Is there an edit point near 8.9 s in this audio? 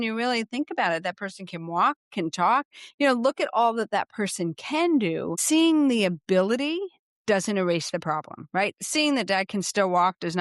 no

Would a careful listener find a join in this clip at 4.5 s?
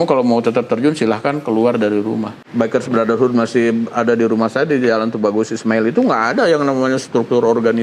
no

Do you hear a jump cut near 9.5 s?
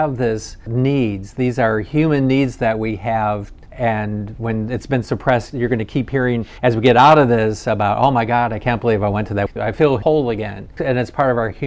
yes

